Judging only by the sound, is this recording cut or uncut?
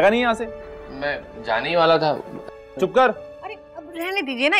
uncut